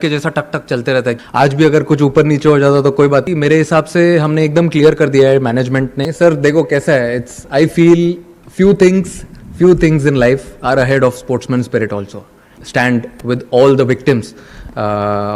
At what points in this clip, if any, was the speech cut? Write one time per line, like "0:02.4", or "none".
0:01.2
0:03.3
0:06.0
0:12.6